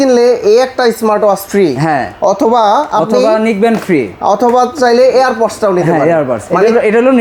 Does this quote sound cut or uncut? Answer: uncut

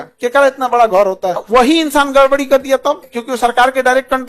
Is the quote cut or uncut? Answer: cut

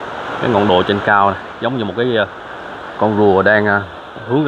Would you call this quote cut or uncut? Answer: uncut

